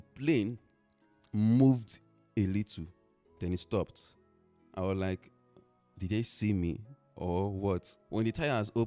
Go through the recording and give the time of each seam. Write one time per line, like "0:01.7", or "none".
0:08.0